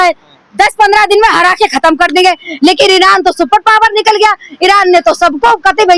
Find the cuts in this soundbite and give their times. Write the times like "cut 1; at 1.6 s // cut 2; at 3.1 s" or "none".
none